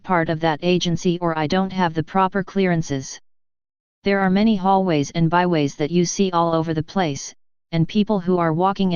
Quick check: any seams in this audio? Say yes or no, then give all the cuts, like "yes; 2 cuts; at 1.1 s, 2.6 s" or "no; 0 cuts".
no; 0 cuts